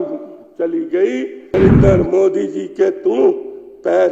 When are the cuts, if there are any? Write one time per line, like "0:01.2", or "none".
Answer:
0:01.5

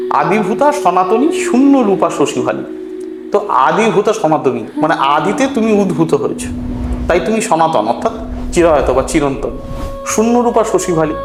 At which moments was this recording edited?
none

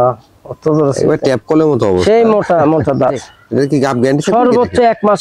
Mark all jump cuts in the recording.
0:03.3

